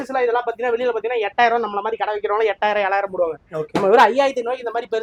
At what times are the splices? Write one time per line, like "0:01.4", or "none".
none

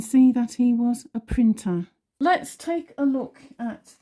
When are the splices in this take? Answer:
0:02.0

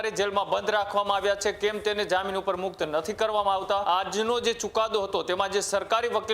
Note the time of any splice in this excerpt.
0:03.8

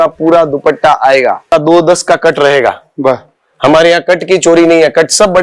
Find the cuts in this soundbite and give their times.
0:01.5

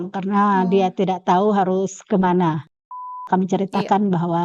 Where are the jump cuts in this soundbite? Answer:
0:03.2

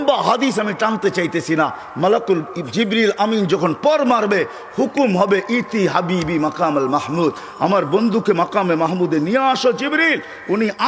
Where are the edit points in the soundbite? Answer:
none

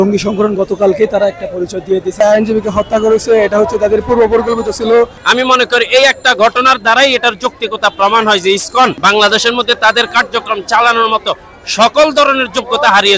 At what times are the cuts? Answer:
0:02.2
0:05.2
0:09.0

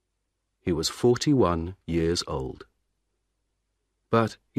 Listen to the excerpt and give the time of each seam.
none

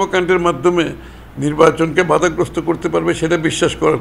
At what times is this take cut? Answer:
none

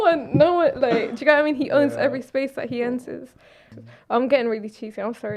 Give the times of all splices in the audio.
0:03.7

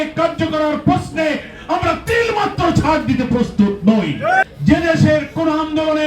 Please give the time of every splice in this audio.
0:04.4

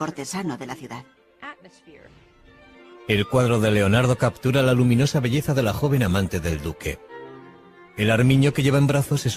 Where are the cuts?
0:08.1

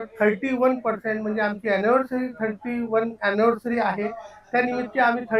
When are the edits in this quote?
none

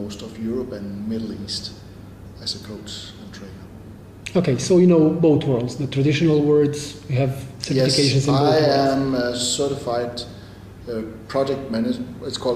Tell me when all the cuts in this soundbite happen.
0:04.2

